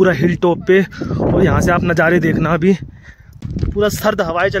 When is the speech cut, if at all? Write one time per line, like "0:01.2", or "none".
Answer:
0:03.4